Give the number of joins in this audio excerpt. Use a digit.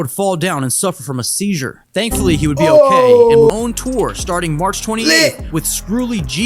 1